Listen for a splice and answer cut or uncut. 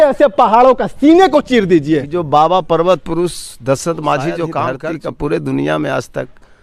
cut